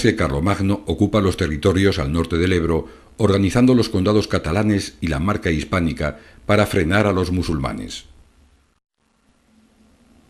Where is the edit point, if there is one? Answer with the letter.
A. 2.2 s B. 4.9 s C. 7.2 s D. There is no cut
D